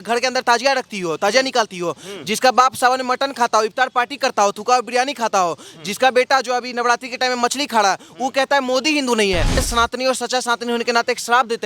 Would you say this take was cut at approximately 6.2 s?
no; 1 cut; at 9.6 s

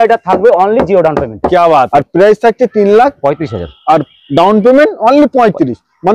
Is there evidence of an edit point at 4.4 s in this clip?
no; 1 cut; at 1.9 s

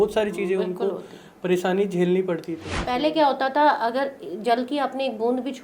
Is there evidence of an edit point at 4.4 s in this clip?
no; 1 cut; at 2.7 s

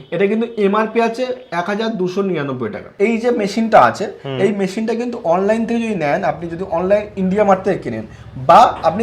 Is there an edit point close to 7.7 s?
no; 1 cut; at 2.8 s

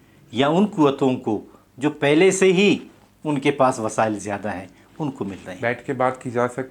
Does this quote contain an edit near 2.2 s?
no; 1 cut; at 5.5 s

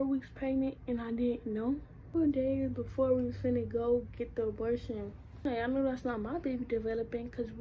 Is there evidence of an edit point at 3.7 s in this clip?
no; 2 cuts; at 2.1 s, 5.4 s

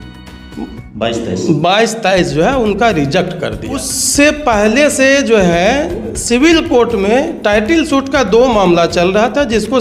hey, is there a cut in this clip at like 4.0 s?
yes; 1 cut; at 4.0 s

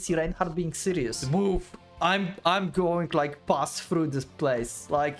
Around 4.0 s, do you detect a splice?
no; 1 cut; at 1.2 s

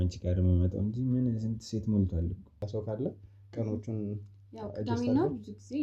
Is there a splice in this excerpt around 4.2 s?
no; 1 cut; at 2.6 s

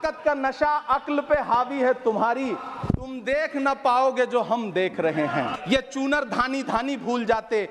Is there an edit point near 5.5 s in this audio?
yes; 1 cut; at 5.5 s

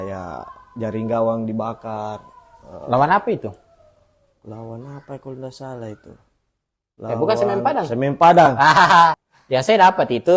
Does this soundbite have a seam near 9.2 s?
yes; 1 cut; at 9.2 s

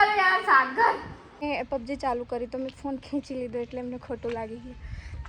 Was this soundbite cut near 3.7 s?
no; 1 cut; at 1.4 s

